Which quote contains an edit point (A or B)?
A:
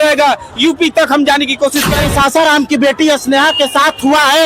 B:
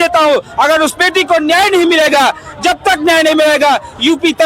A